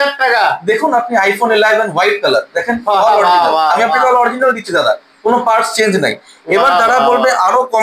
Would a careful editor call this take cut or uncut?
uncut